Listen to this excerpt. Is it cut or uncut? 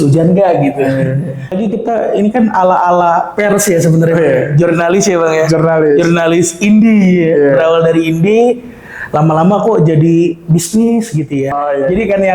cut